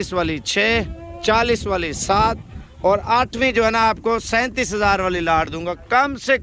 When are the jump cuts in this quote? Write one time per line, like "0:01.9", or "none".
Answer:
none